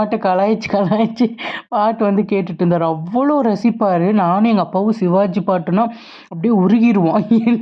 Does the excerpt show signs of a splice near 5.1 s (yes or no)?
no